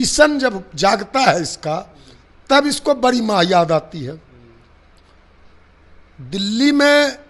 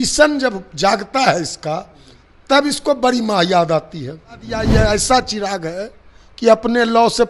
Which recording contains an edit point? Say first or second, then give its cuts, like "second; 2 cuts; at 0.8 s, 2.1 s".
second; 1 cut; at 4.7 s